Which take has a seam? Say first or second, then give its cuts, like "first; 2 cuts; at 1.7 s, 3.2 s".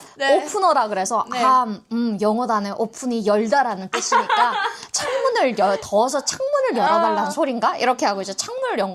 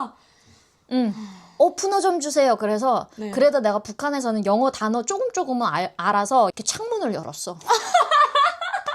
second; 1 cut; at 6.5 s